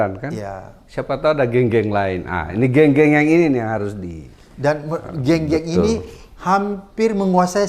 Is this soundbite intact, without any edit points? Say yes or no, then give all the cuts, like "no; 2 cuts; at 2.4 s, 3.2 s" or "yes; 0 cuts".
yes; 0 cuts